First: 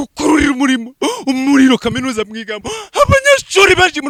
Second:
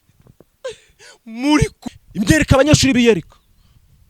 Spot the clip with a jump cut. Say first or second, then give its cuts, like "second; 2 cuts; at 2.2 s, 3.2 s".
second; 1 cut; at 1.8 s